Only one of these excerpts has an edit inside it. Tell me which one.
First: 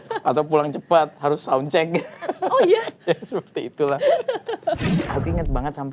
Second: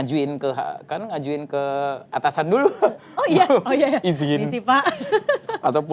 first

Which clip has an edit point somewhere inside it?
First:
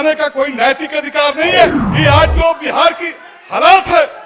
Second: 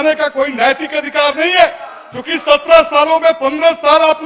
first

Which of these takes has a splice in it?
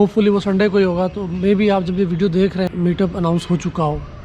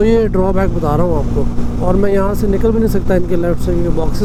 first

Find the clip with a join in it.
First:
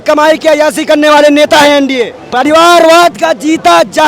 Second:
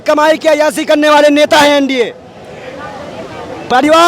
first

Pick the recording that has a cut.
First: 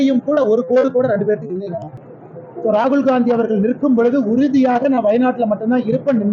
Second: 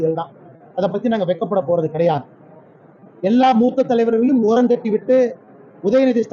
first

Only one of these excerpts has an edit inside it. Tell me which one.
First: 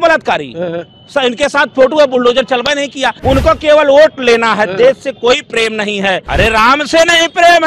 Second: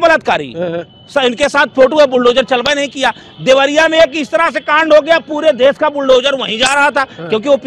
first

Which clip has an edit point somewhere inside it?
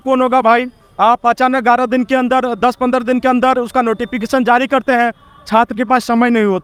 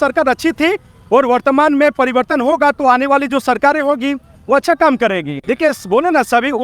second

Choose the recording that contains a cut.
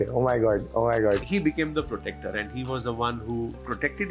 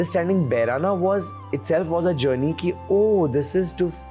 first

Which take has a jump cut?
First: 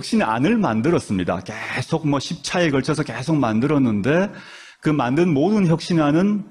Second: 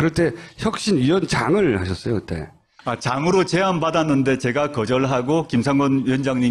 first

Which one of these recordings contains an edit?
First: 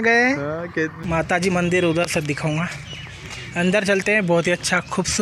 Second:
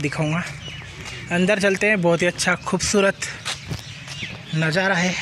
first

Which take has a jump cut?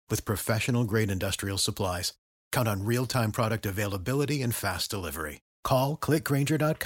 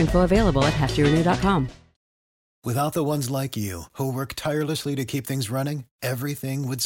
second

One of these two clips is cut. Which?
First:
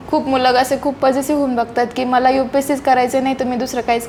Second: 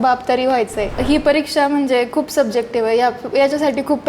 second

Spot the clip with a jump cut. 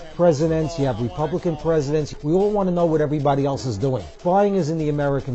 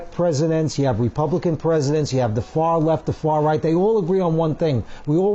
first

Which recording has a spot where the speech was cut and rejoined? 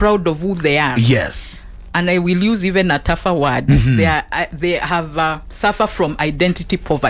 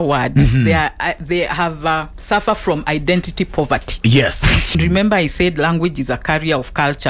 second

